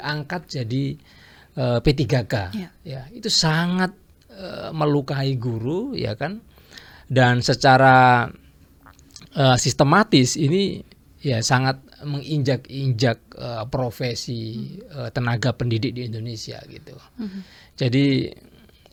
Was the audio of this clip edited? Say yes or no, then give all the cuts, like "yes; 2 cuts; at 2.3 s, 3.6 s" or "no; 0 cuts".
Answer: no; 0 cuts